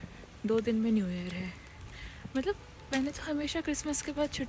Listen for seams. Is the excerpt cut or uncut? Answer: uncut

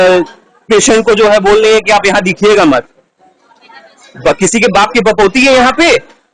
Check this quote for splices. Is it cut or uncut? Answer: uncut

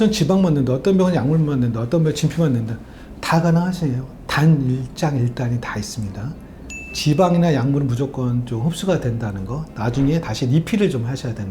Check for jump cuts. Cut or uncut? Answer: cut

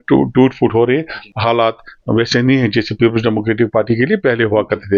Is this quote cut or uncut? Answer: cut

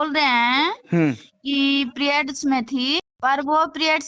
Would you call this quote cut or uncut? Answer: uncut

